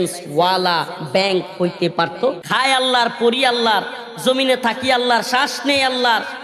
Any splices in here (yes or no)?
yes